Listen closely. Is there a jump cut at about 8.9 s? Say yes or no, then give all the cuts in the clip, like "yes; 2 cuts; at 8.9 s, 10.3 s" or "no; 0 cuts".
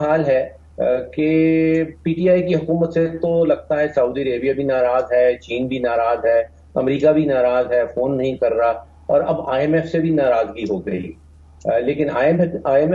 no; 0 cuts